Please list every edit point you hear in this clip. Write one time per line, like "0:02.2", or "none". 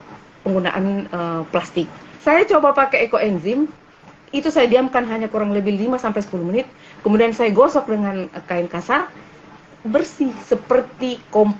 0:02.0